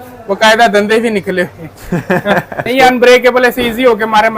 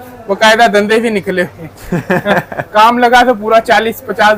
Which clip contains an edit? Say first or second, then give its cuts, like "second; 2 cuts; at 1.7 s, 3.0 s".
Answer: first; 1 cut; at 2.7 s